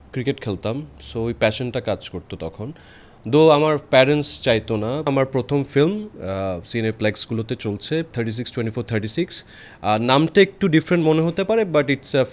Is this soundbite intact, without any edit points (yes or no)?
no